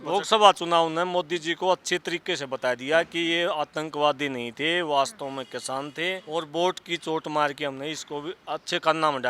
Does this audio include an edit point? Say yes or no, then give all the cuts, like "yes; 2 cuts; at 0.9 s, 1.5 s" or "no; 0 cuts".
yes; 1 cut; at 6.2 s